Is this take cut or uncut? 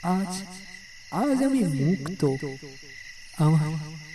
uncut